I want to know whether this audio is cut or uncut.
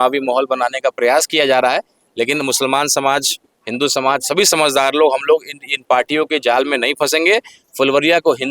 cut